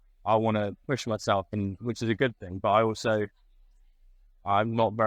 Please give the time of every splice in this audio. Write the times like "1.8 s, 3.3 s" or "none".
none